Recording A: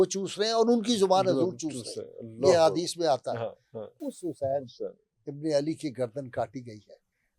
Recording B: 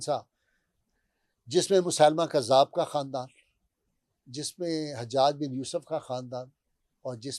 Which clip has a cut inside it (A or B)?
A